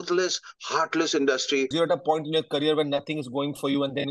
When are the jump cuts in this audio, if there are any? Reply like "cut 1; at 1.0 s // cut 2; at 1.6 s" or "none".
cut 1; at 1.7 s